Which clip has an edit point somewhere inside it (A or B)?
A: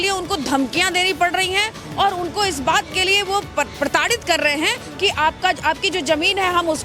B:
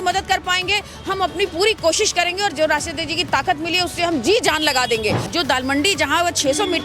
B